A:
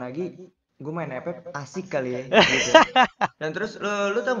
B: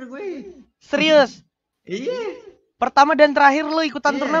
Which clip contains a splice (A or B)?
A